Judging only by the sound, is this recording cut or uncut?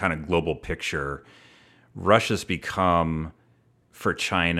uncut